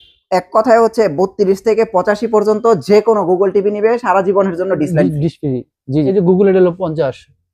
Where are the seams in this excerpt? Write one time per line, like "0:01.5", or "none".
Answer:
0:06.1